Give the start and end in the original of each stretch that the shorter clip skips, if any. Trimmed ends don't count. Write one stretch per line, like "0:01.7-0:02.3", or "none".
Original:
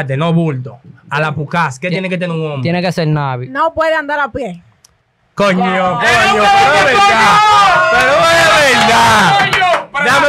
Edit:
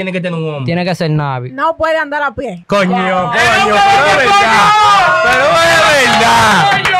0:04.5-0:05.3